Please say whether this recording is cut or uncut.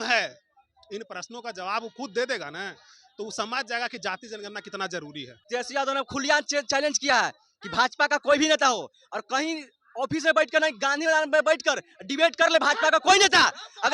cut